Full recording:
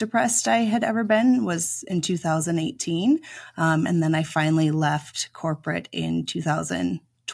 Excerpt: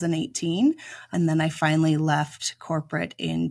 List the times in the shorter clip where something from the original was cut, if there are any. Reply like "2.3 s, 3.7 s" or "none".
1.1 s